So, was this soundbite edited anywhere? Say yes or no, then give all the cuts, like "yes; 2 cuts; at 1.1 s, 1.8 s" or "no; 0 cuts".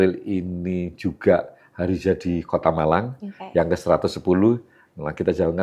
no; 0 cuts